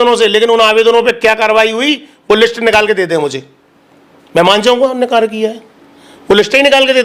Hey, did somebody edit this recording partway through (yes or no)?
no